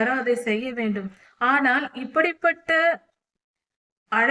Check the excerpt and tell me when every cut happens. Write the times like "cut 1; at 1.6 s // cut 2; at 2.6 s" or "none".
cut 1; at 1.1 s